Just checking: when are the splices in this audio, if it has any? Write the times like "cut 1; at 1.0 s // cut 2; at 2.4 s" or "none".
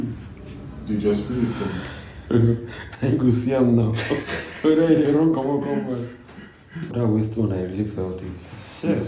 cut 1; at 6.9 s